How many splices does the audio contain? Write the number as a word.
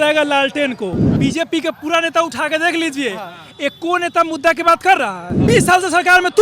two